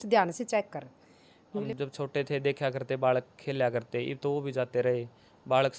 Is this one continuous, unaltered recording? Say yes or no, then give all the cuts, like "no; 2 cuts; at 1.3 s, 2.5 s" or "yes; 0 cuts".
no; 1 cut; at 1.6 s